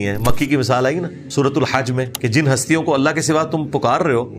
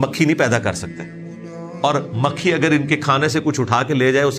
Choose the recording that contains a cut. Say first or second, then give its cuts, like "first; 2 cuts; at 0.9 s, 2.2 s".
first; 2 cuts; at 1.2 s, 2.1 s